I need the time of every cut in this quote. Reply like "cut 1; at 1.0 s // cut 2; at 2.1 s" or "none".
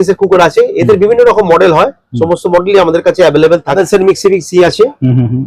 cut 1; at 3.7 s